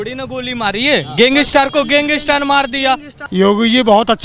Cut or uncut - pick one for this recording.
cut